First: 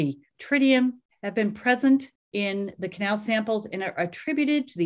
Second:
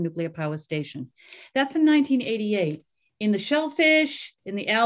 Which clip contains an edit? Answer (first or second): first